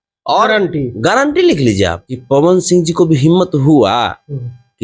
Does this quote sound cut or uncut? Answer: cut